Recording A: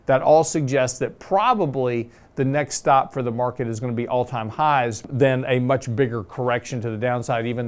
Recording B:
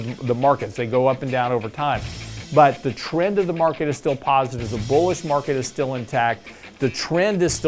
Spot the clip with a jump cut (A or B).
A